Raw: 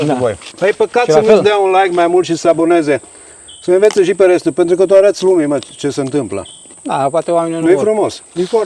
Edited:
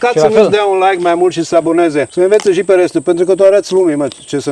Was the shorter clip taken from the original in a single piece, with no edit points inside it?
no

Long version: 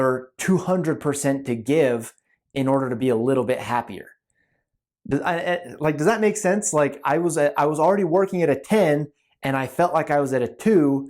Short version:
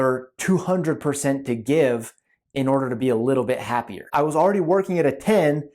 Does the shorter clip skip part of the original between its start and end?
yes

